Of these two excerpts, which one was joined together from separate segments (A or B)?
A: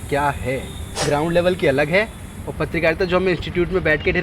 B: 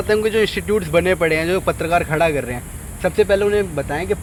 A